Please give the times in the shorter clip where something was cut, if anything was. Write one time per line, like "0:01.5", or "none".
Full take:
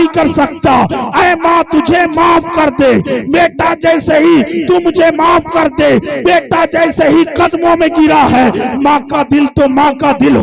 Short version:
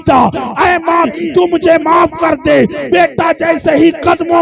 0:01.1